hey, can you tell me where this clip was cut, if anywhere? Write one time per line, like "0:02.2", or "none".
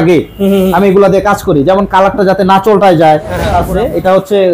0:03.6

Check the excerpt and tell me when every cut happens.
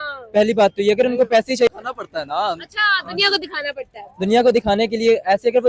0:01.7

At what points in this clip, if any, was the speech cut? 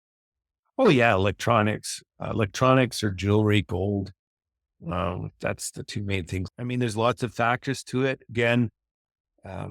0:06.5

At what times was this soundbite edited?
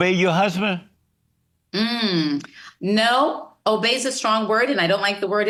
none

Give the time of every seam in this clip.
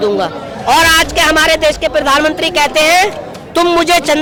none

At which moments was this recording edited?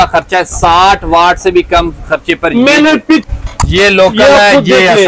0:03.2

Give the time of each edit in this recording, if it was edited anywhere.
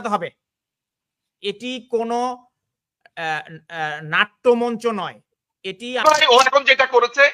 0:06.0

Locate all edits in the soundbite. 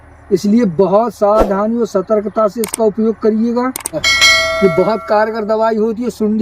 0:04.1

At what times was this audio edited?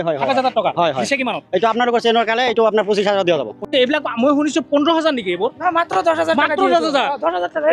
0:03.6

